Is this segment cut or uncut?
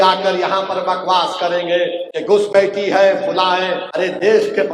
cut